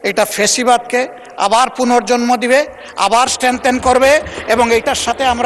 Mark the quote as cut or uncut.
uncut